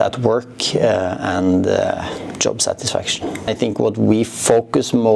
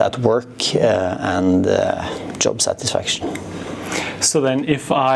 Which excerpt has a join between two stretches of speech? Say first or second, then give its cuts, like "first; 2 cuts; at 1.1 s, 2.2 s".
first; 1 cut; at 3.5 s